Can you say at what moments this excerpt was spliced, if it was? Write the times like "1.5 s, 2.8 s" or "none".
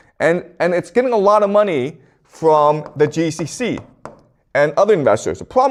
none

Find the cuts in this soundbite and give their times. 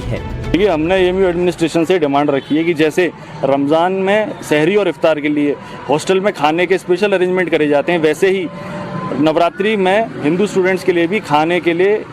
3.2 s

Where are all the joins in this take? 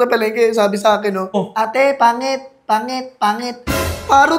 1.4 s

